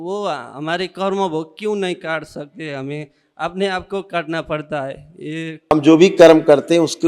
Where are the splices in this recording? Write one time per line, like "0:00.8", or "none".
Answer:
0:05.7